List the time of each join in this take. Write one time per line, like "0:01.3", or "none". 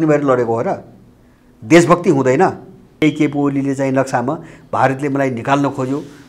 0:03.0